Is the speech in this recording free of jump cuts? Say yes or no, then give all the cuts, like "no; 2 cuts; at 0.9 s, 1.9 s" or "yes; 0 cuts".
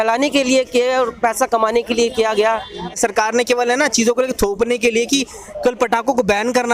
no; 1 cut; at 3.0 s